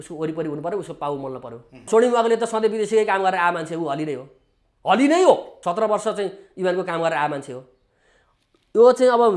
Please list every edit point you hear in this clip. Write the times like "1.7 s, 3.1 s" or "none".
1.9 s, 5.5 s